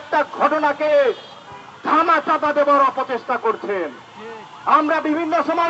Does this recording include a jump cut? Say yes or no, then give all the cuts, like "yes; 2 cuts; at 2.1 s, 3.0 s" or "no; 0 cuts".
no; 0 cuts